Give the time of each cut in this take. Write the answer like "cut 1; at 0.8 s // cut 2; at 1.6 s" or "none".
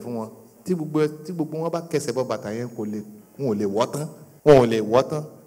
cut 1; at 4.2 s